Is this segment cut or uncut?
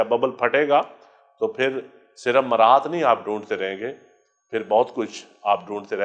uncut